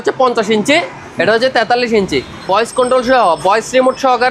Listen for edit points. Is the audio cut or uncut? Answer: cut